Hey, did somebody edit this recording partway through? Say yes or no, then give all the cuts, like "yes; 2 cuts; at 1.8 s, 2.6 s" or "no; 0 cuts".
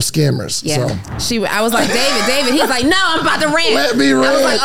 yes; 1 cut; at 1.1 s